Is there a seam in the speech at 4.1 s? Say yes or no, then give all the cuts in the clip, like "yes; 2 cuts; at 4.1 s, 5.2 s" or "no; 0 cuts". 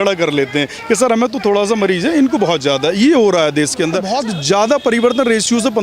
yes; 1 cut; at 4.1 s